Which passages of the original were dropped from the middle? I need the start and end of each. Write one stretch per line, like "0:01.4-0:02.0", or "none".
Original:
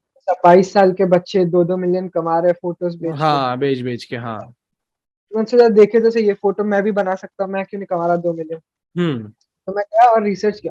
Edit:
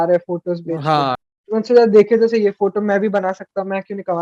0:03.5-0:05.0